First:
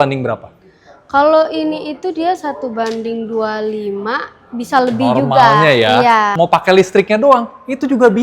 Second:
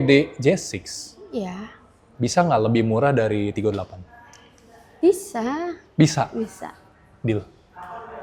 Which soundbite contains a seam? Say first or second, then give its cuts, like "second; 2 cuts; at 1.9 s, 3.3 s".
first; 1 cut; at 6.3 s